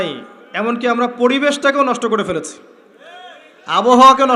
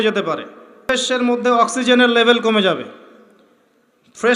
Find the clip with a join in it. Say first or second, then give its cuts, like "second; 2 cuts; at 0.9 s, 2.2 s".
second; 1 cut; at 0.9 s